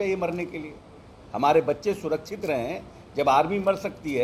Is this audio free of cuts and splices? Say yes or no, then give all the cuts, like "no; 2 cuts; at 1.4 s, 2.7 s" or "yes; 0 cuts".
yes; 0 cuts